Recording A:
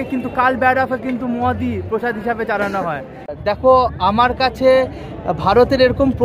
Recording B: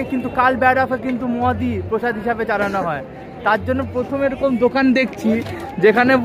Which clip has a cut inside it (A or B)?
A